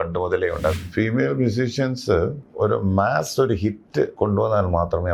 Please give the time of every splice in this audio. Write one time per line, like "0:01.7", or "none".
0:00.8
0:02.4
0:04.1